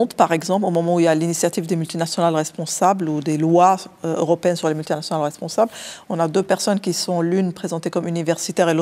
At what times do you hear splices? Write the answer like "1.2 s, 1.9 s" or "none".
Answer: none